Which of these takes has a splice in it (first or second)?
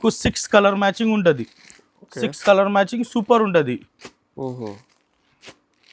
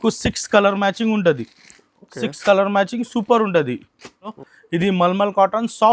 second